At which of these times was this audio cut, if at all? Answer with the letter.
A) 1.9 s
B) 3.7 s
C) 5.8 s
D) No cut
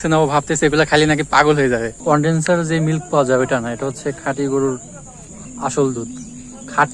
A